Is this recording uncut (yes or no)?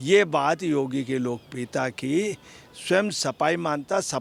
yes